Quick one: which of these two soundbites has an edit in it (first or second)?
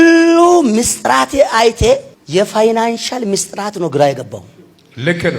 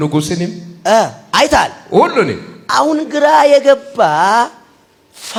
first